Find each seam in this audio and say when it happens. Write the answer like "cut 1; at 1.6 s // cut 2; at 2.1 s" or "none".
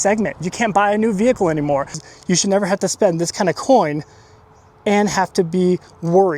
cut 1; at 2.0 s